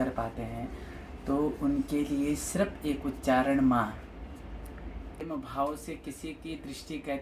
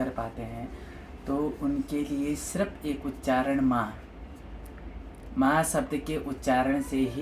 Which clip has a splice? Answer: first; 1 cut; at 5.2 s

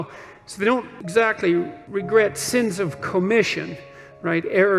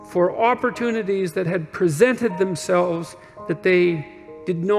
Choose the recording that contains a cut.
first; 2 cuts; at 1.0 s, 1.8 s

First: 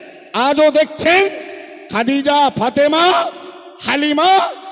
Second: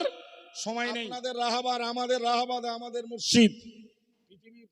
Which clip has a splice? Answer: second; 1 cut; at 1.0 s

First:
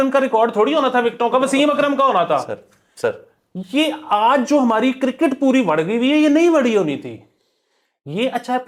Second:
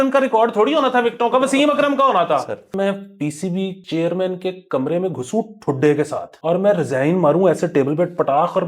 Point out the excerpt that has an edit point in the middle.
second; 3 cuts; at 2.7 s, 3.8 s, 6.3 s

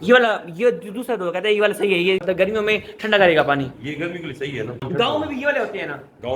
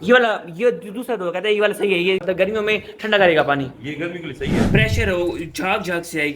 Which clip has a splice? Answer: second; 1 cut; at 4.6 s

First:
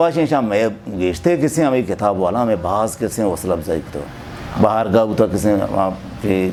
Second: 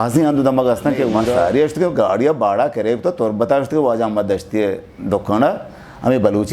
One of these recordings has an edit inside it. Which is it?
second; 1 cut; at 1.4 s

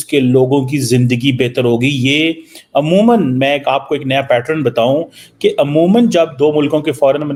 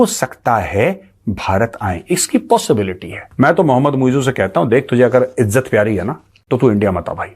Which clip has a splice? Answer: second; 2 cuts; at 3.2 s, 6.3 s

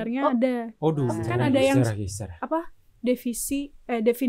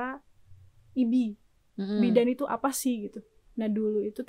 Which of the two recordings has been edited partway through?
first; 1 cut; at 1.3 s

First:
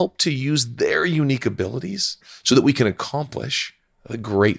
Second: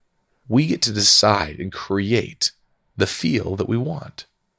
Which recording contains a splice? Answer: first; 1 cut; at 2.3 s

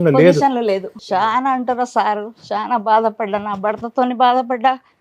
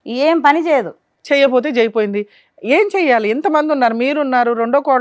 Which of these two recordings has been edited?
first; 1 cut; at 0.9 s

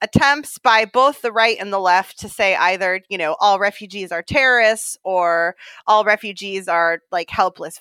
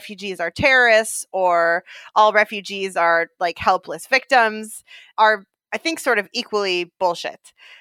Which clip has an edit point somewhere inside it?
second; 1 cut; at 5.0 s

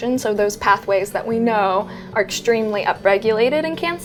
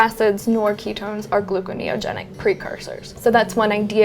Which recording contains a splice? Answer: second; 1 cut; at 3.1 s

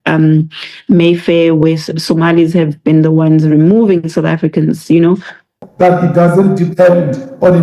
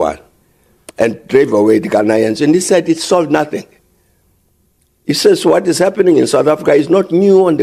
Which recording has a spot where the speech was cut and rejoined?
first; 1 cut; at 5.6 s

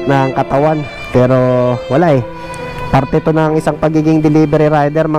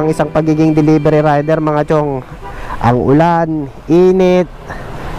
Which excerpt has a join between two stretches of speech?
first; 1 cut; at 0.9 s

